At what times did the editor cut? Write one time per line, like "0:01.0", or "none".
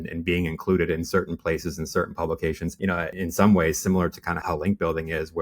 0:02.9
0:04.4